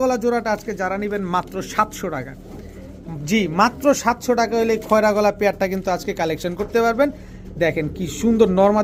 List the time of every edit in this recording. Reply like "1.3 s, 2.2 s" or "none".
none